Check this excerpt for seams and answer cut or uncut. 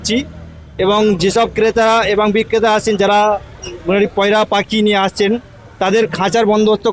uncut